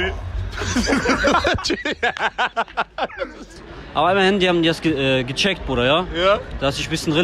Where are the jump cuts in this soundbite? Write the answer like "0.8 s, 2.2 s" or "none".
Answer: 3.6 s